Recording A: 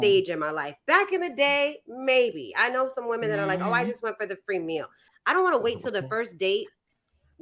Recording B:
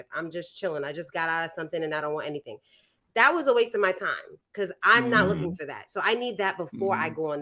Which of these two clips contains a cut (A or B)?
A